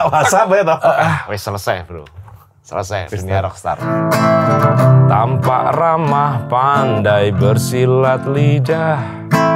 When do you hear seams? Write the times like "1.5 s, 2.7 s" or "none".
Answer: 3.9 s